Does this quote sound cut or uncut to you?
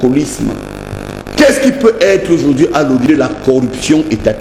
uncut